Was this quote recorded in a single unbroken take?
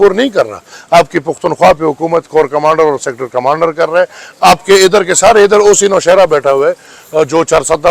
yes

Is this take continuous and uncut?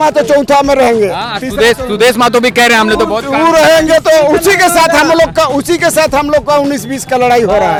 yes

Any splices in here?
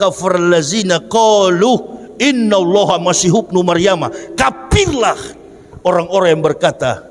no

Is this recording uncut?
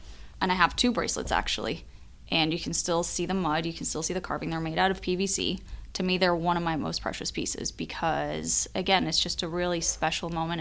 yes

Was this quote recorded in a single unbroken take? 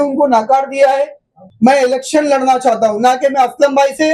no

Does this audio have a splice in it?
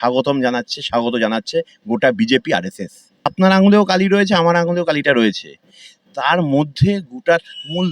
yes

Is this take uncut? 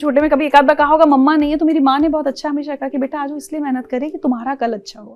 yes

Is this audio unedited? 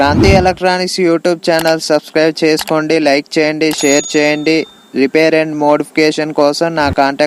yes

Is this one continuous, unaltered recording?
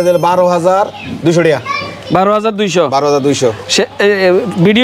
yes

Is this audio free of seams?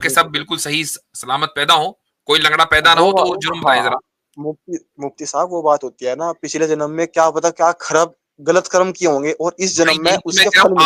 yes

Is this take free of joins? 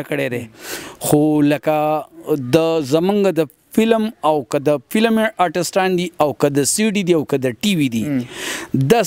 yes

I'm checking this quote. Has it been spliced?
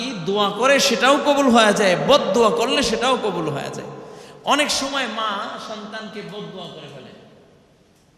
no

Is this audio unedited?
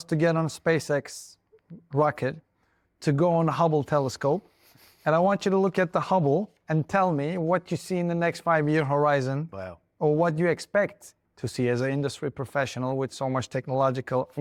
yes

